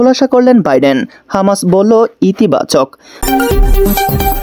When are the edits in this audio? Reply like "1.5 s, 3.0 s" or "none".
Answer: 3.1 s